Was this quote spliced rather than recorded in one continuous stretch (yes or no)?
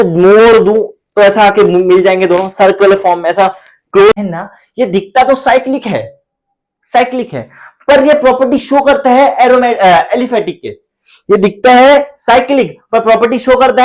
yes